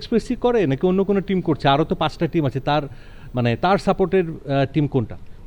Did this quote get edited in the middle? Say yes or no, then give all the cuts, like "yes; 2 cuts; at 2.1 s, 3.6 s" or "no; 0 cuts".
no; 0 cuts